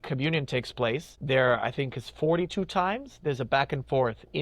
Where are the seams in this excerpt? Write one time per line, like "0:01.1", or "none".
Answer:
0:01.1